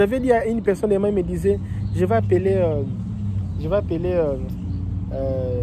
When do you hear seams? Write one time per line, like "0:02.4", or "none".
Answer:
none

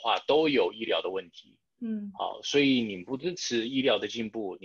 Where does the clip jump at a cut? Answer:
none

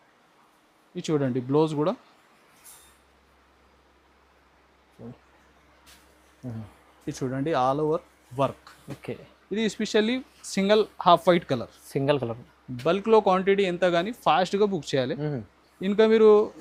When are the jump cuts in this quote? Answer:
none

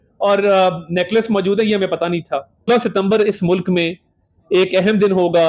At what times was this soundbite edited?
0:02.7

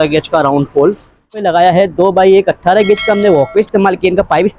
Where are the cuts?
0:01.3

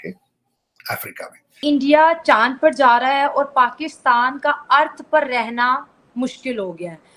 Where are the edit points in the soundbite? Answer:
0:01.5

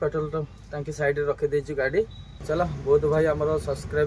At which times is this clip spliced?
0:02.3

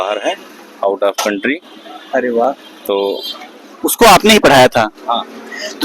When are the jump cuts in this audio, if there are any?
none

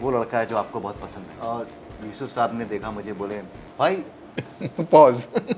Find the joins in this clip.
0:01.3
0:03.6

